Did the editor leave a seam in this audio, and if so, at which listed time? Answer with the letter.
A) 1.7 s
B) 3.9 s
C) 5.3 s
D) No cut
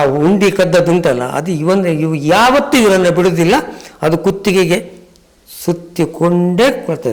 D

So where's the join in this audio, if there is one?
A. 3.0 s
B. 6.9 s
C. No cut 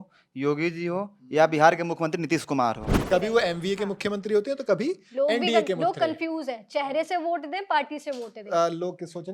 A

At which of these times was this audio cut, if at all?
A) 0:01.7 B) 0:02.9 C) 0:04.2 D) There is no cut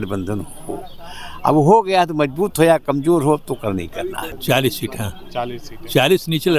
C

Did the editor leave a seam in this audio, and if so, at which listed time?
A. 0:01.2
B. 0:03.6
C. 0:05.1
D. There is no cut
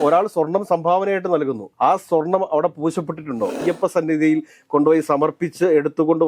B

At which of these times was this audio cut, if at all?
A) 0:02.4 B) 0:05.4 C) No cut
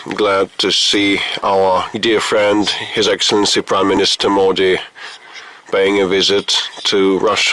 C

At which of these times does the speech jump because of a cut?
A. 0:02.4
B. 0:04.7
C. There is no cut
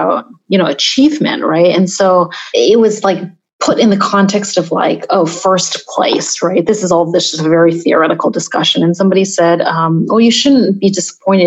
A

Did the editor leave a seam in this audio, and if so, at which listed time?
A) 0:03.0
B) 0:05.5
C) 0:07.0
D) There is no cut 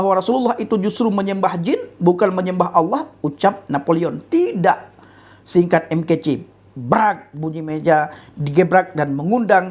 D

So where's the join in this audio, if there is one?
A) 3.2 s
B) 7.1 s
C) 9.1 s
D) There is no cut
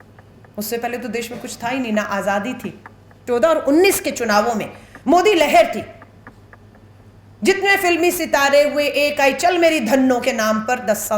A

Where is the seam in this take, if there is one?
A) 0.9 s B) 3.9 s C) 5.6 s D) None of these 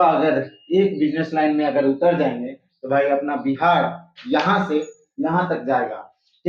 D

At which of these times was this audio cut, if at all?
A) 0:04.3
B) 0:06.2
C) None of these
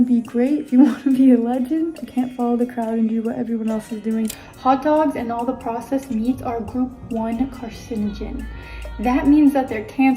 A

